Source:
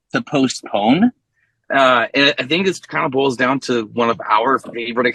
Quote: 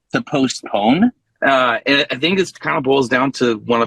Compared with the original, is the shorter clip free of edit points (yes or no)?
no